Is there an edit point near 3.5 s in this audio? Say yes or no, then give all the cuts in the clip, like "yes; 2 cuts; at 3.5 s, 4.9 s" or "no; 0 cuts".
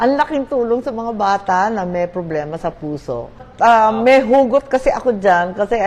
yes; 1 cut; at 3.5 s